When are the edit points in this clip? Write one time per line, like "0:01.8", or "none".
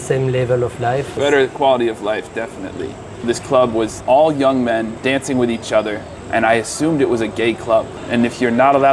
0:01.2
0:03.2
0:04.0
0:04.9
0:06.1
0:08.0